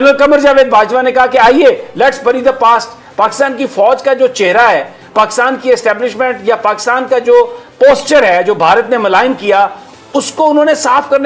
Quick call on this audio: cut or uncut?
uncut